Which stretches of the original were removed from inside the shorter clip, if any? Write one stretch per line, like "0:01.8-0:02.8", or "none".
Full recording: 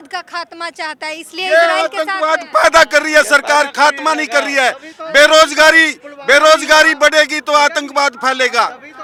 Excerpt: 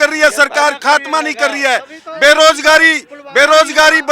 none